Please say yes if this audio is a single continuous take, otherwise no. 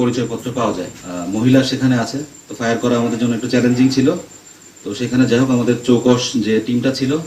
no